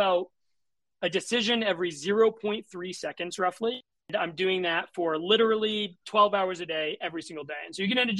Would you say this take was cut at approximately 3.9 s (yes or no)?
yes